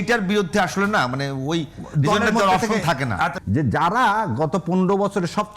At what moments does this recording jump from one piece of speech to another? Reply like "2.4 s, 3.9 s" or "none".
3.4 s